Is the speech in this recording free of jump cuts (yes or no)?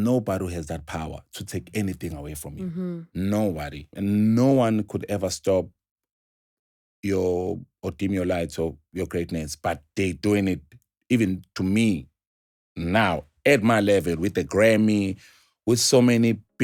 no